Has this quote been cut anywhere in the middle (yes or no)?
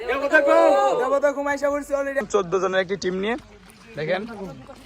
yes